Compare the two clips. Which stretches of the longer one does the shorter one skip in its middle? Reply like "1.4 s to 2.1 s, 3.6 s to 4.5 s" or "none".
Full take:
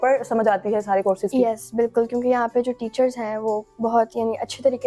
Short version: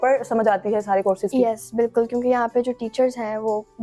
none